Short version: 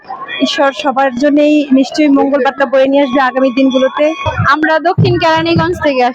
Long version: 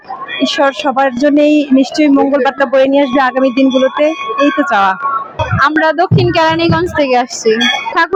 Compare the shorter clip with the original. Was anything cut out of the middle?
yes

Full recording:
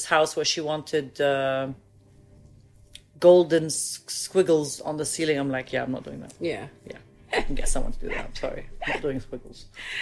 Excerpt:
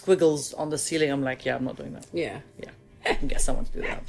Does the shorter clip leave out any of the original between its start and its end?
no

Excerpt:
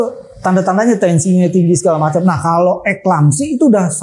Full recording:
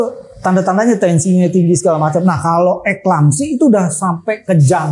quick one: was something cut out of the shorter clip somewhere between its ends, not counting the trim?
no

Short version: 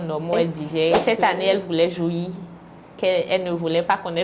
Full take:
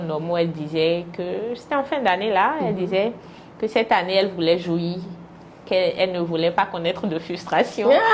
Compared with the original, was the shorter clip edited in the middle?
yes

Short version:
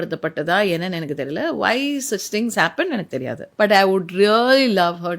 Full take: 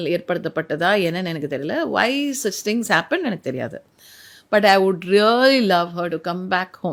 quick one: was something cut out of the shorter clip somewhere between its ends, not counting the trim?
yes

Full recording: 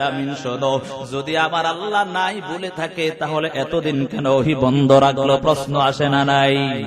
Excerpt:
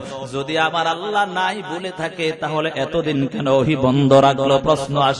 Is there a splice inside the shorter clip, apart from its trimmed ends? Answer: no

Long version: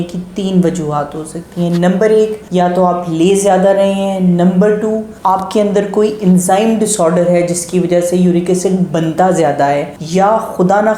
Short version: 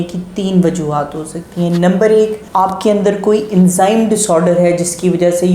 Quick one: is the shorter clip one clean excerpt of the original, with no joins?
no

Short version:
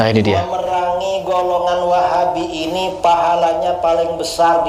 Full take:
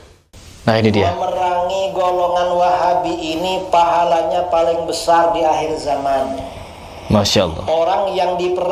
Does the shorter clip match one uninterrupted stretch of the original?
yes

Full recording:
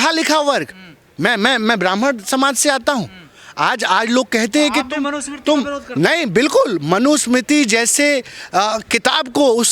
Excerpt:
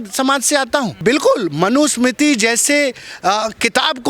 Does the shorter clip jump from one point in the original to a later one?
yes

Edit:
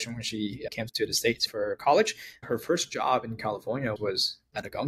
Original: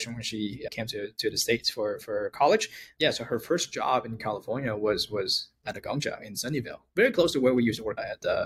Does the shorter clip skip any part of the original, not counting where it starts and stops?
yes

